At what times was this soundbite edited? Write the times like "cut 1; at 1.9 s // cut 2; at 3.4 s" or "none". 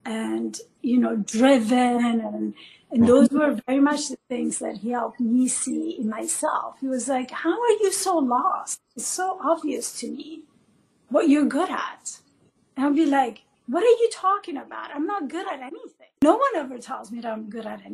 cut 1; at 16.2 s